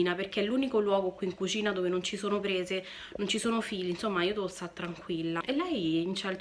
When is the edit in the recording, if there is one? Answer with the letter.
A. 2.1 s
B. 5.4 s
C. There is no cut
B